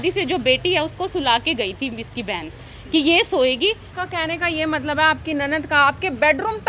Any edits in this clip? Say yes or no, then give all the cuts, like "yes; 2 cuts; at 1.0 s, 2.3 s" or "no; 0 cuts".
yes; 1 cut; at 3.9 s